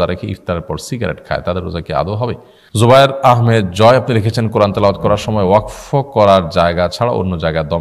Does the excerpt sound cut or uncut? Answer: cut